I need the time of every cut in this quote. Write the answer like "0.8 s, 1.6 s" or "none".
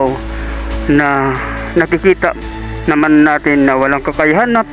none